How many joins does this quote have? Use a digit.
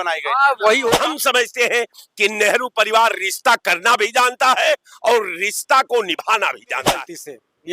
2